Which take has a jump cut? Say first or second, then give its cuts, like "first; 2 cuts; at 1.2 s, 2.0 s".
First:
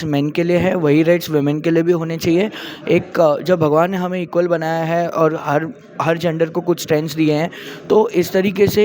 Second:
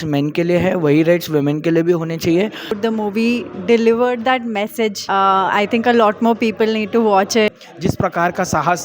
second; 3 cuts; at 2.8 s, 5.0 s, 7.5 s